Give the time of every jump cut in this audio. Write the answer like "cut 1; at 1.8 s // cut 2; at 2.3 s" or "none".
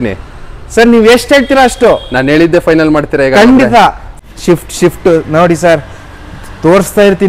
cut 1; at 4.1 s